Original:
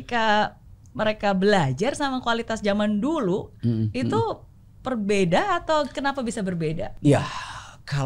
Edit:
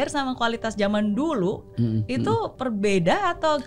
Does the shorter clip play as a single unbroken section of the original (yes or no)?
no